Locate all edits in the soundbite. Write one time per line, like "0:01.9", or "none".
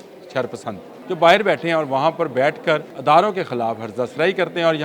0:00.9
0:02.9